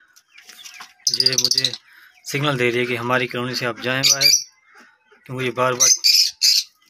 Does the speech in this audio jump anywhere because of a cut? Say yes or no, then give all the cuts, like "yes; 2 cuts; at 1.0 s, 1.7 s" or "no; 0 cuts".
no; 0 cuts